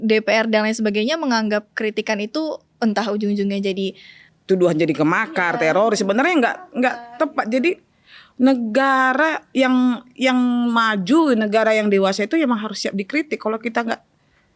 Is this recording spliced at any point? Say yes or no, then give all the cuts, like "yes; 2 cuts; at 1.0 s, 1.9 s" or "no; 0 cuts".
no; 0 cuts